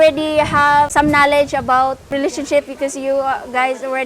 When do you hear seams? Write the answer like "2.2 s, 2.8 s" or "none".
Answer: 0.9 s, 2.1 s